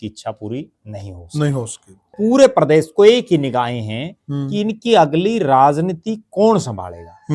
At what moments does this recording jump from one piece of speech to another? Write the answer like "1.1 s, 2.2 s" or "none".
2.1 s